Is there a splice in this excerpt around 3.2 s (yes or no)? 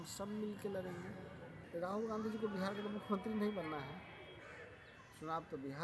no